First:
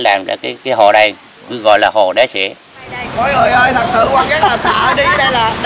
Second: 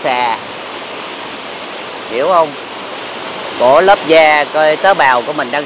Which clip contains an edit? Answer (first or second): first